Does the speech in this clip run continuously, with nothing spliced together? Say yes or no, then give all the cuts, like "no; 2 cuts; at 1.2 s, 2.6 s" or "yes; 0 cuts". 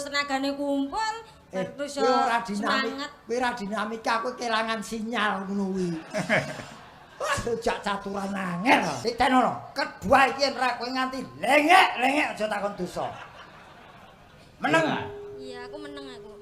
no; 1 cut; at 9.0 s